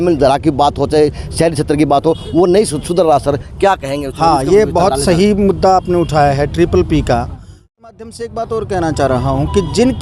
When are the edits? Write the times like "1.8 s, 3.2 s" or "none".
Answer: 7.7 s